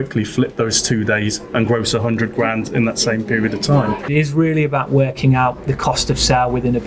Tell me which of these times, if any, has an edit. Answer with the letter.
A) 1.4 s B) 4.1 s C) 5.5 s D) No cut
B